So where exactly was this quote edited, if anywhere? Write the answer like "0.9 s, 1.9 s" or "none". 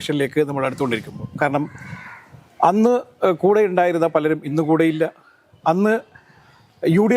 none